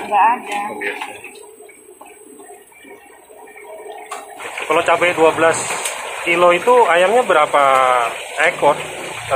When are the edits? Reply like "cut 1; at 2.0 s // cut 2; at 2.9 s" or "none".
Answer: cut 1; at 4.4 s